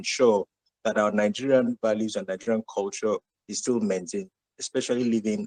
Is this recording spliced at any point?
no; 0 cuts

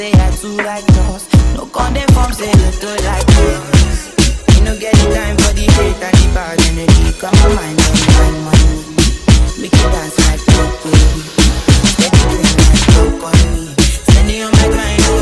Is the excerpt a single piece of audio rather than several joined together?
no; 1 cut; at 11.8 s

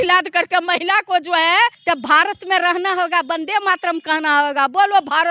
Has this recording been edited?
yes; 1 cut; at 1.8 s

